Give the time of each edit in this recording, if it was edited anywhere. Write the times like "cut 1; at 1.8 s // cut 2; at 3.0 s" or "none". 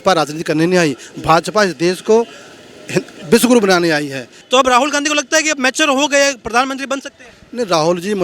cut 1; at 4.3 s